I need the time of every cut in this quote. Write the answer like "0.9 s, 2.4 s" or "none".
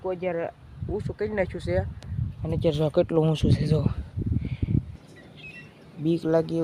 4.9 s